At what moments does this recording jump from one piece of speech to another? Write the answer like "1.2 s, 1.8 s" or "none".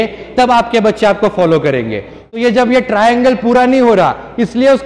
2.1 s